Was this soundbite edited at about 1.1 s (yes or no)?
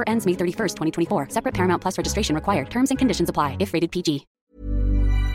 no